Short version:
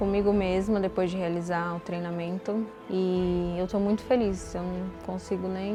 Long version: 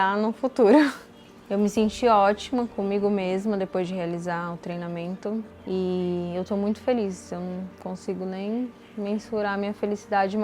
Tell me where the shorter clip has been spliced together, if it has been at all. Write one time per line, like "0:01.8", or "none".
none